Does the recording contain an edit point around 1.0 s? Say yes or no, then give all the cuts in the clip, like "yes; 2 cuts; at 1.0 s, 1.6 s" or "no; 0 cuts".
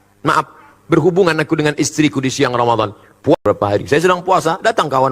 no; 1 cut; at 3.4 s